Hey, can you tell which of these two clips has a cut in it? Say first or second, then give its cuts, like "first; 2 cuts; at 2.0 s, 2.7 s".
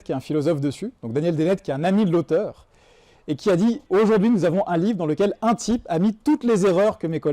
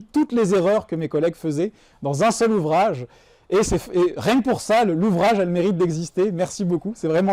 first; 1 cut; at 3.8 s